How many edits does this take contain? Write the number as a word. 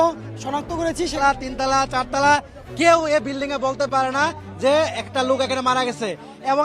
one